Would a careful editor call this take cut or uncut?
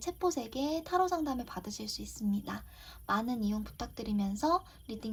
uncut